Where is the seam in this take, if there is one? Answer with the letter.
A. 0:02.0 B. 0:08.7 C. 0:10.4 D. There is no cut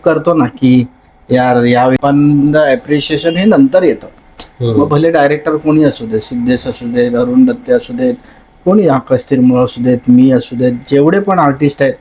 A